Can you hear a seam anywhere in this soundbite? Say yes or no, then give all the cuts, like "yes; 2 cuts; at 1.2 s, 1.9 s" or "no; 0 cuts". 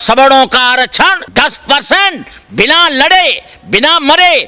yes; 1 cut; at 1.2 s